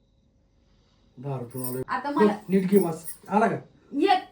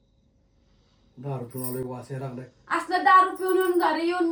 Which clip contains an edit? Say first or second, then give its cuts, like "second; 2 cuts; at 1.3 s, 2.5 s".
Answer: first; 1 cut; at 1.8 s